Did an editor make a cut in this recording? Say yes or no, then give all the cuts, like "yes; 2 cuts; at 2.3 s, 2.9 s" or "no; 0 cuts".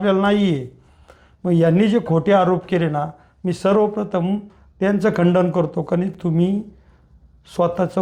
no; 0 cuts